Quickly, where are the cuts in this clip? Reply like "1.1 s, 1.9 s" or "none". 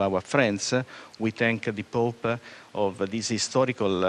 1.3 s